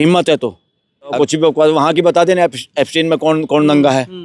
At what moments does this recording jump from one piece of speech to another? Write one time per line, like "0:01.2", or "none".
0:01.2